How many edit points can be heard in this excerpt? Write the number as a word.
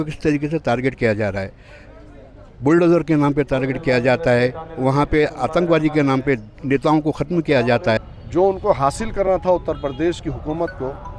one